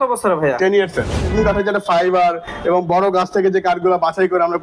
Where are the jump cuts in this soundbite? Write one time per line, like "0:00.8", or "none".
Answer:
0:01.3

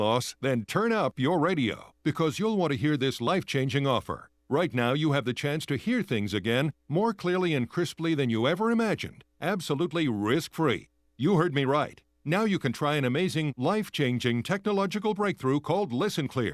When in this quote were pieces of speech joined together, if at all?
none

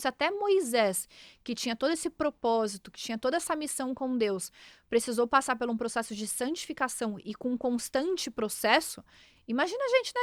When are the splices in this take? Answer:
none

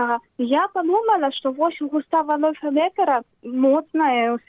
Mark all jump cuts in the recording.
none

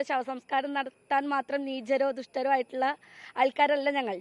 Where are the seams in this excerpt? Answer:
none

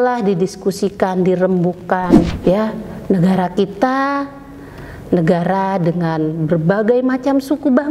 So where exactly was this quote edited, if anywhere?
0:02.3

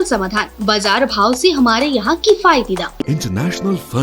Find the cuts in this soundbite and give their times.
0:03.0

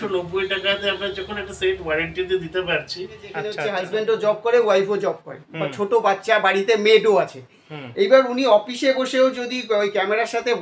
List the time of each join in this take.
0:03.5

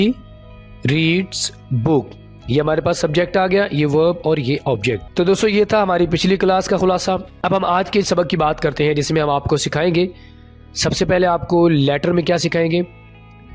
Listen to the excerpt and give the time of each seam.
0:05.1
0:07.3

